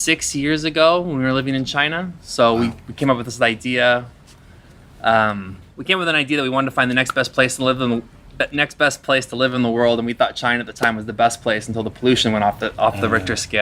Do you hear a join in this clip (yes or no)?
no